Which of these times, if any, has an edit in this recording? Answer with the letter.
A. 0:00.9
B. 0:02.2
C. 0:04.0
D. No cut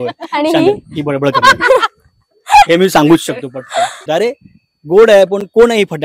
C